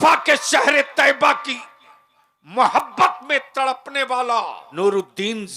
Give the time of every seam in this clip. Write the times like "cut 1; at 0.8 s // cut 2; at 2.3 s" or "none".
cut 1; at 4.6 s